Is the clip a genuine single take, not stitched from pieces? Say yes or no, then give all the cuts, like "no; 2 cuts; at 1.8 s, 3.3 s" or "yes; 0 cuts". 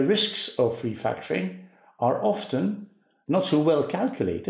no; 1 cut; at 3.1 s